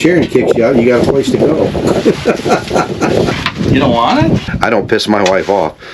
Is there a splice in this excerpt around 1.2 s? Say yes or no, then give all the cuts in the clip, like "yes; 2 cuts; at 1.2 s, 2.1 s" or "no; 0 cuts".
no; 2 cuts; at 3.4 s, 4.5 s